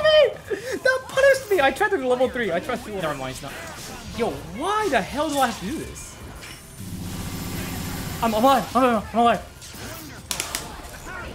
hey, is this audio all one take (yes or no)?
no